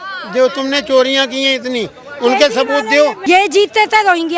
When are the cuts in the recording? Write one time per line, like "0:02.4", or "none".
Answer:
0:03.2